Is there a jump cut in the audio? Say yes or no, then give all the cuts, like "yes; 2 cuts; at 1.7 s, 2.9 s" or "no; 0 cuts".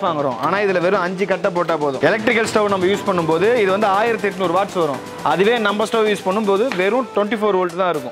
no; 0 cuts